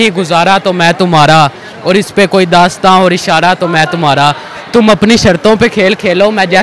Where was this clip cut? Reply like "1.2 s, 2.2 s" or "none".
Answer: none